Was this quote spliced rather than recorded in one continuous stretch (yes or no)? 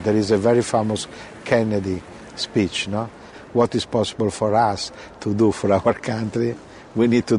yes